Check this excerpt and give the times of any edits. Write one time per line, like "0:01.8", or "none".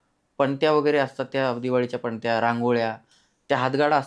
none